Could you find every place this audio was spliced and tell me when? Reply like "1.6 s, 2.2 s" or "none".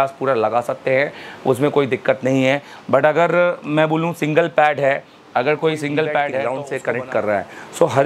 6.5 s